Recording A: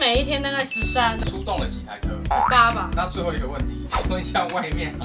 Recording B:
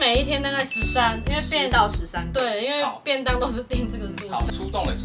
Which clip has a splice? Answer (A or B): A